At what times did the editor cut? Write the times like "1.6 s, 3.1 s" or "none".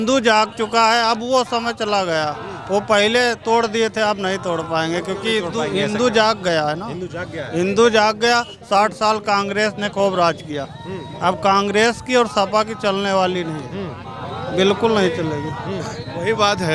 none